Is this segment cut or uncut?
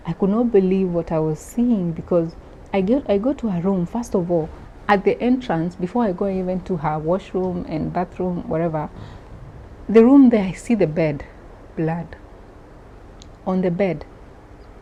uncut